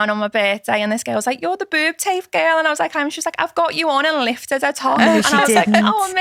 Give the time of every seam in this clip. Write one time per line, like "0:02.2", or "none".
none

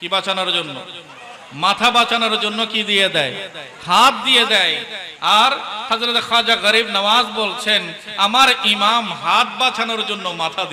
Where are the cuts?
none

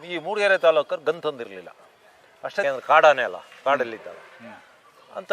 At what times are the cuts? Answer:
0:02.6

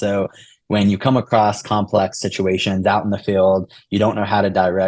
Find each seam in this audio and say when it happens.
none

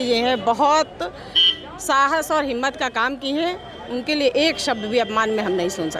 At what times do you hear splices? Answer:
none

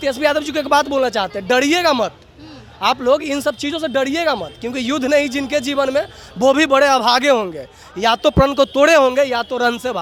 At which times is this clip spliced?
none

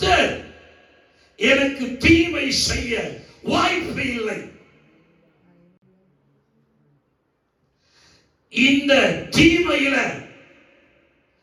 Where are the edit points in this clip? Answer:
none

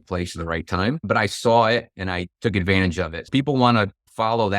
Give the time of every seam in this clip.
0:01.0

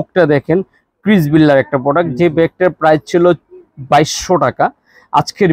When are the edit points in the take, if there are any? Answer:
none

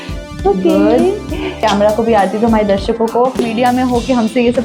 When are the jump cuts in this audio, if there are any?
0:01.6
0:03.4

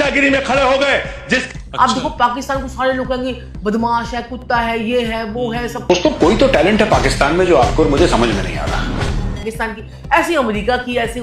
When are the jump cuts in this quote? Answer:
0:01.5
0:05.8
0:09.5

